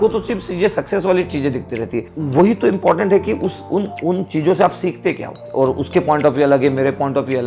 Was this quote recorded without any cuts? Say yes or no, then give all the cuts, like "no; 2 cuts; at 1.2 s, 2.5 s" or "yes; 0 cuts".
no; 2 cuts; at 2.1 s, 5.3 s